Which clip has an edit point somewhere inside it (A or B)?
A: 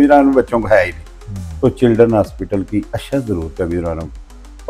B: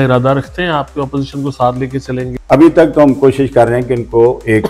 B